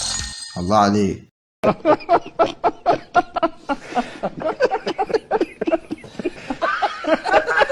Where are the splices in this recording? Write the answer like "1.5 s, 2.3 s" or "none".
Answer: 6.4 s